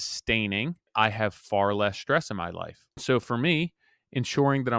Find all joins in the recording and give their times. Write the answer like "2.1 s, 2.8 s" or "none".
0.9 s, 2.9 s